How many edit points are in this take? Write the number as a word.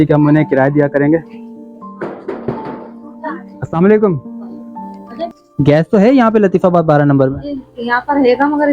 one